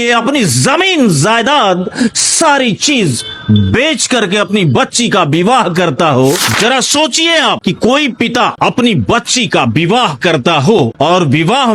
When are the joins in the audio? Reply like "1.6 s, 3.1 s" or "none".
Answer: 6.5 s

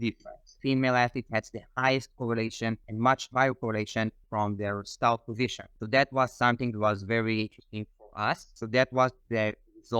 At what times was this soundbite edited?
4.2 s, 8.5 s

